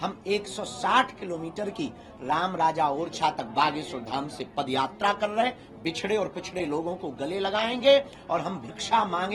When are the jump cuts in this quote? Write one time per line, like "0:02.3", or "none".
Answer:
none